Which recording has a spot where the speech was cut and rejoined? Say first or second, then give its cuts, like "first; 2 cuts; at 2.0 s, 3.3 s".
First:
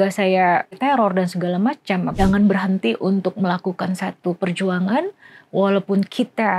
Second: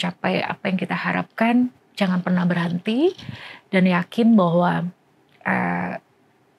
first; 2 cuts; at 0.7 s, 2.1 s